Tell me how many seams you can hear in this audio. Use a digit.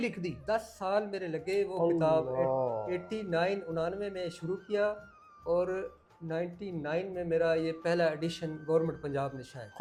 0